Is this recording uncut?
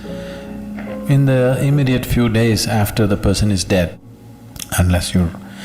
no; 1 cut; at 3.9 s

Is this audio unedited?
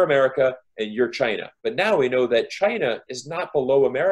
no; 1 cut; at 1.6 s

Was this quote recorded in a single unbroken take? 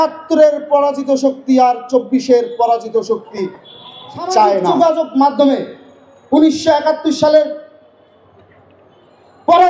no; 1 cut; at 4.7 s

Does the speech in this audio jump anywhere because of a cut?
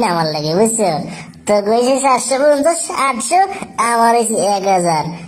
no; 0 cuts

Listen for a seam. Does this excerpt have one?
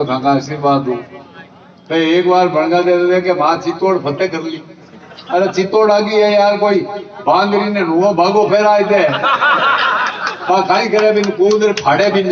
no; 0 cuts

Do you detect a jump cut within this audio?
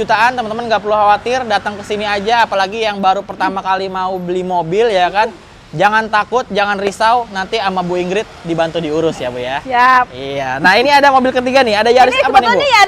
no; 0 cuts

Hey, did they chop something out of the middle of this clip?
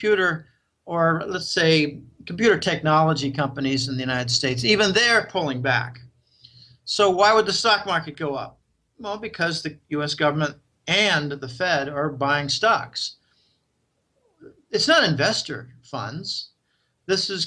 no; 0 cuts

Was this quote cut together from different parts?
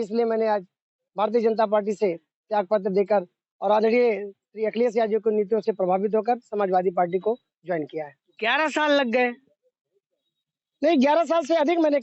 no; 0 cuts

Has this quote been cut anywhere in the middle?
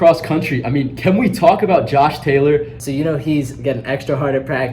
yes; 1 cut; at 2.8 s

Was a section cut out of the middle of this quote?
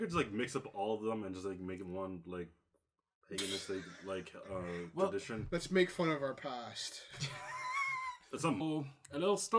no; 0 cuts

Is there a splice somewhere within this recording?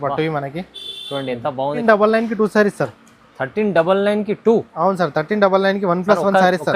yes; 1 cut; at 1.8 s

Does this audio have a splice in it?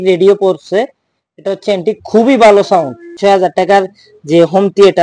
yes; 1 cut; at 3.2 s

